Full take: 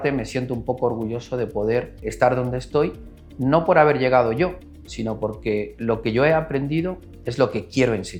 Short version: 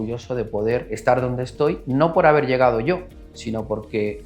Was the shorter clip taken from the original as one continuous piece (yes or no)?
no